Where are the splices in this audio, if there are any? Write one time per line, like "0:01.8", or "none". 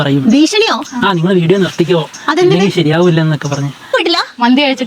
0:03.9